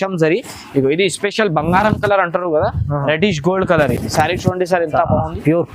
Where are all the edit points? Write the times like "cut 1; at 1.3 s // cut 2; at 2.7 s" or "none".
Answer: none